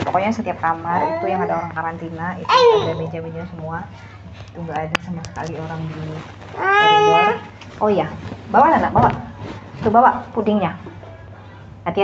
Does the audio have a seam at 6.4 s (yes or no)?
no